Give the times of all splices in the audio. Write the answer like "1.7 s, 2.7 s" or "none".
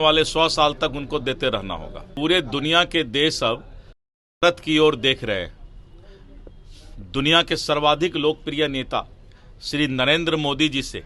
2.0 s